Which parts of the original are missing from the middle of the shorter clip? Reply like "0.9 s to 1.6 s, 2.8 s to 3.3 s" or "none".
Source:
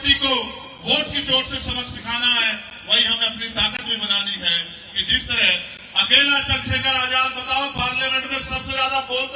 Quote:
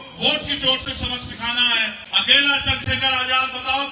2.7 s to 5.8 s